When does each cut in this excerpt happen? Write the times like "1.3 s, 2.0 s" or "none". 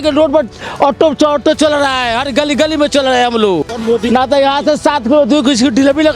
3.7 s